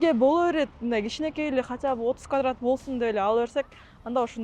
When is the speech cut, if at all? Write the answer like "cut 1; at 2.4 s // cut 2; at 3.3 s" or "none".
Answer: none